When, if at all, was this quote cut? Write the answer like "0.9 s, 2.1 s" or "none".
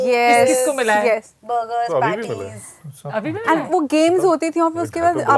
none